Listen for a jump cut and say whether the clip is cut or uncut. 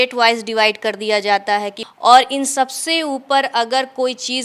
cut